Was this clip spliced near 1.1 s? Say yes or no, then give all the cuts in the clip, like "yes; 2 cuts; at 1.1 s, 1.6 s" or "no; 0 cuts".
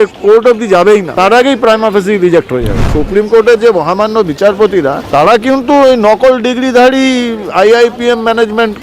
yes; 3 cuts; at 1.1 s, 2.9 s, 5.0 s